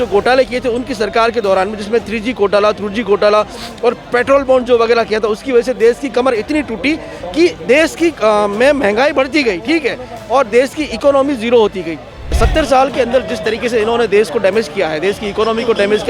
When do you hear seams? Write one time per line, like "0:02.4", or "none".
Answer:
0:12.4